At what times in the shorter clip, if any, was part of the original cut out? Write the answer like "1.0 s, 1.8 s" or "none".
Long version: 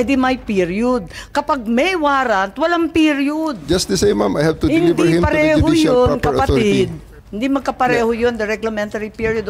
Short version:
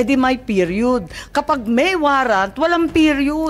none